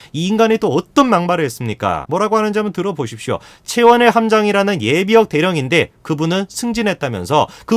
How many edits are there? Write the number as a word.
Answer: one